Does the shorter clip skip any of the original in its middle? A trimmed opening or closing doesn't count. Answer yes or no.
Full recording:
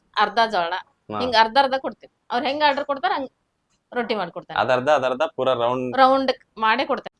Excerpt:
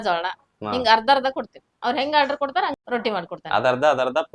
yes